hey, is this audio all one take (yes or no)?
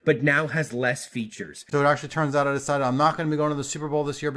no